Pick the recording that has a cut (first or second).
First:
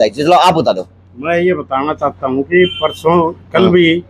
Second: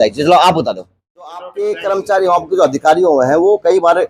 second